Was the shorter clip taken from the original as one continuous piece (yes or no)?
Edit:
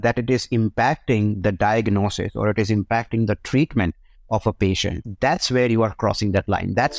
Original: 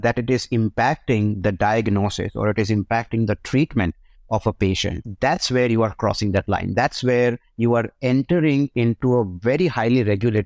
yes